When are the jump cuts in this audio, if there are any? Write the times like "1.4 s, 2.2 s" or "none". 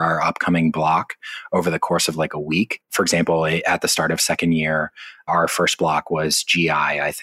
5.3 s

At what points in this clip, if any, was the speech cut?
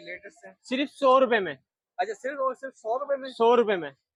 none

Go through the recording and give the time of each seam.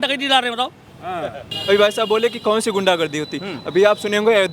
1.5 s

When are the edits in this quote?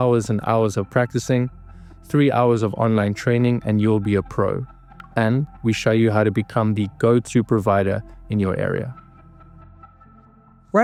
none

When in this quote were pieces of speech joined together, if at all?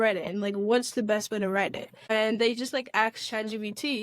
1.9 s

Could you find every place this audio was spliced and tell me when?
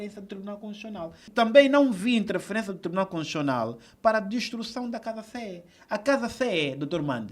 1.3 s

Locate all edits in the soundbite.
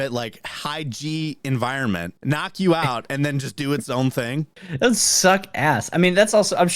2.1 s, 4.6 s

